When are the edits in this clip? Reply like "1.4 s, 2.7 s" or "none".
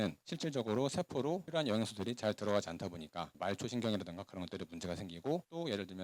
none